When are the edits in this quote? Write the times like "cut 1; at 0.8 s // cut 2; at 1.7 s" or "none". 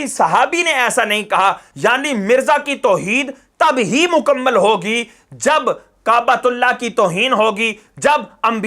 cut 1; at 1.7 s